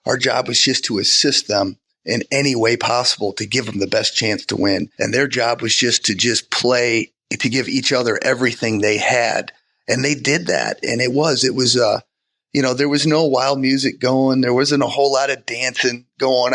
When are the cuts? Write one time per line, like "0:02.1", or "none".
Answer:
0:04.9